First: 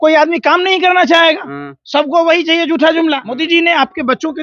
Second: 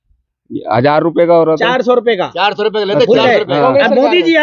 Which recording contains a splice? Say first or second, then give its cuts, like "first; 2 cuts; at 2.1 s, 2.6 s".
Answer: first; 1 cut; at 3.3 s